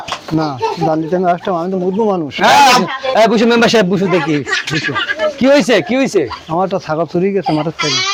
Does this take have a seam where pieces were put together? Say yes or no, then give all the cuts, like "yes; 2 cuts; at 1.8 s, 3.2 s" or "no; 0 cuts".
no; 0 cuts